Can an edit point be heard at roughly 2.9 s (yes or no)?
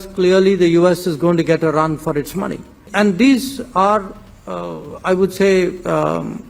yes